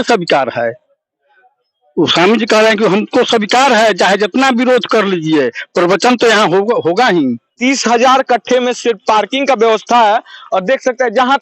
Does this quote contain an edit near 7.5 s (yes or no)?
yes